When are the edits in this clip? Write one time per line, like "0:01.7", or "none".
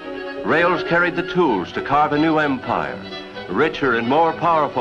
0:02.9